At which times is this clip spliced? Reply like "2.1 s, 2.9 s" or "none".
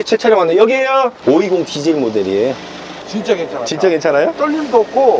1.2 s, 4.3 s

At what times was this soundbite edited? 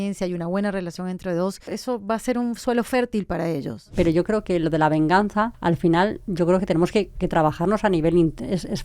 1.7 s, 3.7 s, 5.6 s

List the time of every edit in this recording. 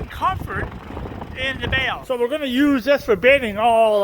2.0 s

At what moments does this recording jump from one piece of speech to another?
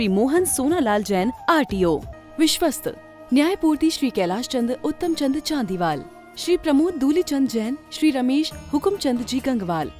2.1 s

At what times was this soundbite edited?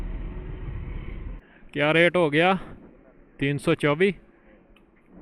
1.5 s

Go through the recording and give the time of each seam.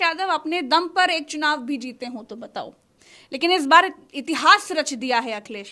none

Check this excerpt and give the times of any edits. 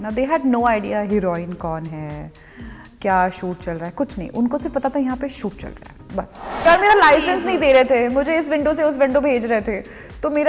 6.4 s

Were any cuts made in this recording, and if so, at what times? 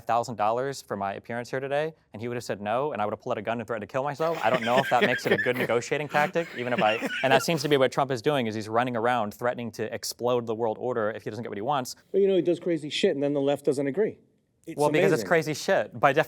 12.0 s

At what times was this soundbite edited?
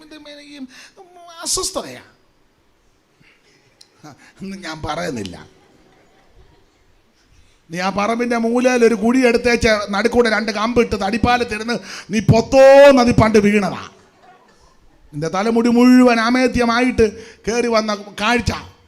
none

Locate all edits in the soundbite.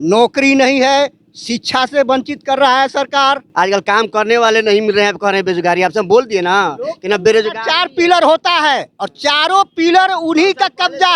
3.4 s

